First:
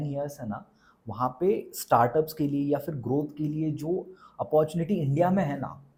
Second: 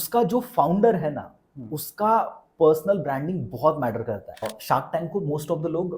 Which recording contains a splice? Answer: second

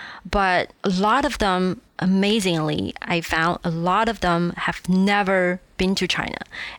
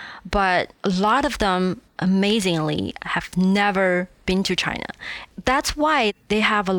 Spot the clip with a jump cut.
second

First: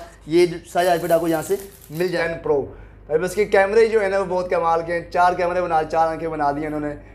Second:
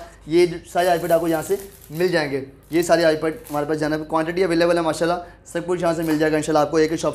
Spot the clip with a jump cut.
first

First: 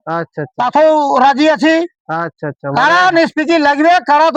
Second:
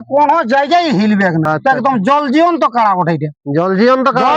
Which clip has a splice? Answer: second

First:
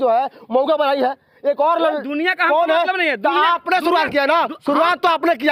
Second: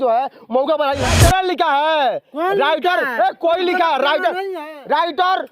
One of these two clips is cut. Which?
second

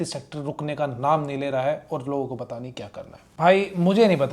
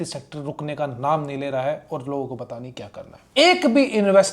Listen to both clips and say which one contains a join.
second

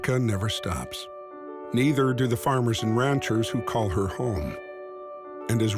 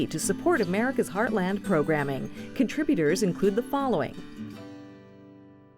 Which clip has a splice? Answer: second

